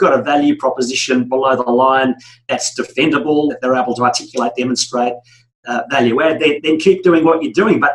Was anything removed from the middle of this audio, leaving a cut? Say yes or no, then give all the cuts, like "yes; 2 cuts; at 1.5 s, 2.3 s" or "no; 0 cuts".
yes; 2 cuts; at 3.6 s, 6.6 s